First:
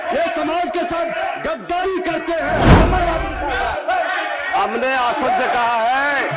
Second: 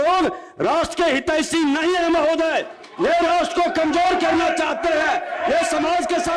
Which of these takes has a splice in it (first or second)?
first